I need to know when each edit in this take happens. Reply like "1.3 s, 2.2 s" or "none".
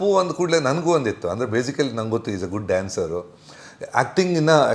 none

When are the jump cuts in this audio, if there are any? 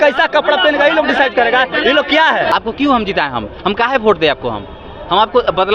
2.5 s

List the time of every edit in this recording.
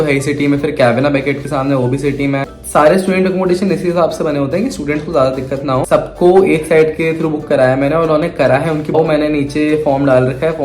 2.5 s, 5.9 s, 8.9 s

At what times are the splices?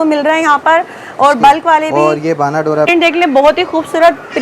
2.9 s

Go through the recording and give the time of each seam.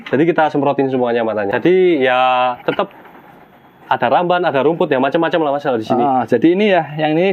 1.5 s

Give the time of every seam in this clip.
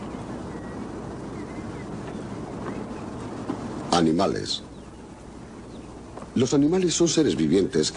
6.5 s

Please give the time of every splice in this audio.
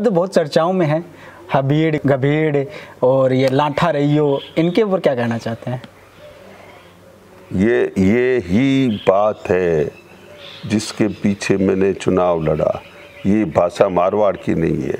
2.0 s

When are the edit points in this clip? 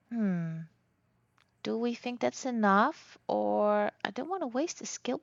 none

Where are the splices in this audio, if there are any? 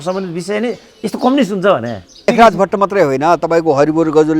2.3 s

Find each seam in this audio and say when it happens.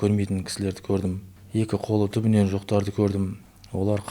1.3 s

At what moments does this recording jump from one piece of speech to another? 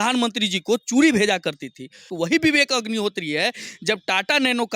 2.1 s

